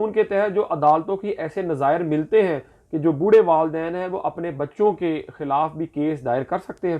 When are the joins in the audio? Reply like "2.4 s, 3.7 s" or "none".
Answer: none

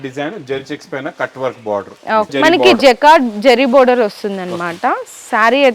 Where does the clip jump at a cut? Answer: 2.3 s

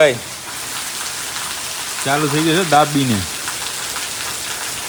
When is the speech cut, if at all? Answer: none

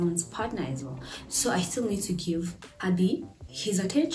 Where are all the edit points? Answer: 2.6 s

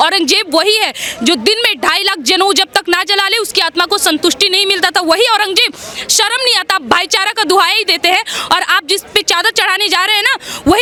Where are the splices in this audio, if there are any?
none

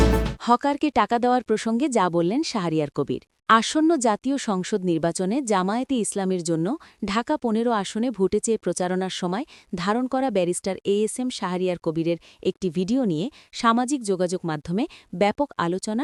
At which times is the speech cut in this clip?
none

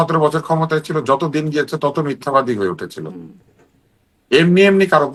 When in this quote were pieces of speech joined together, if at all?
none

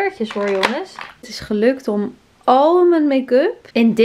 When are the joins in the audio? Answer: 1.4 s

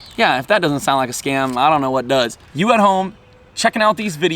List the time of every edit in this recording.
2.4 s

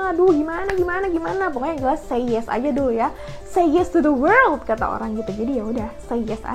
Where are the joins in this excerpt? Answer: none

